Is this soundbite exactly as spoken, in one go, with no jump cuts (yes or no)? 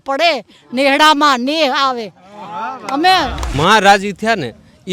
no